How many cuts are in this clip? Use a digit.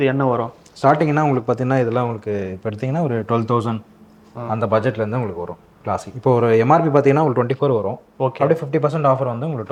0